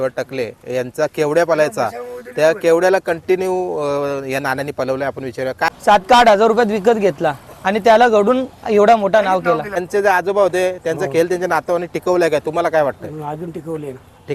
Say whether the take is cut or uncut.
cut